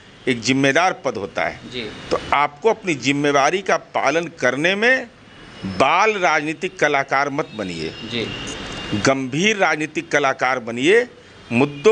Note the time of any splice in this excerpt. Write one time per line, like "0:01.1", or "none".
none

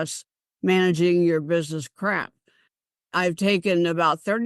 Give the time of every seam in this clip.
none

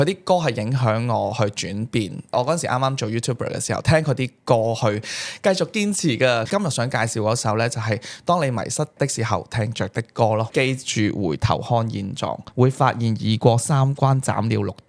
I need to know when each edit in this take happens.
0:06.5
0:10.5
0:12.4

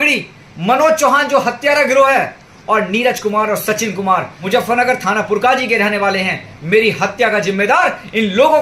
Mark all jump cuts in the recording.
0:04.3

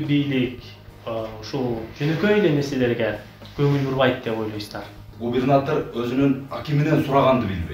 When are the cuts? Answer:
0:05.1

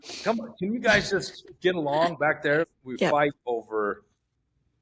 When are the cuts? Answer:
0:02.7

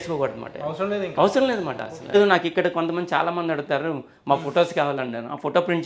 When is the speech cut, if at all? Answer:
0:02.1

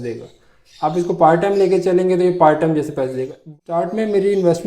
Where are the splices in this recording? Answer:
0:03.4

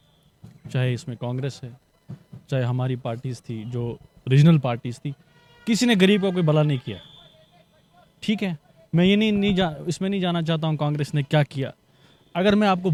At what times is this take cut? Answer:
none

